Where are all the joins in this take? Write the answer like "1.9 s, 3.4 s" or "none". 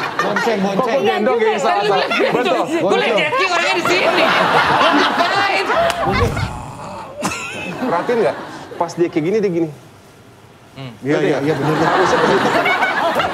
6.4 s